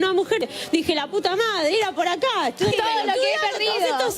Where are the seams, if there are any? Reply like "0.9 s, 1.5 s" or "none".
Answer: 2.7 s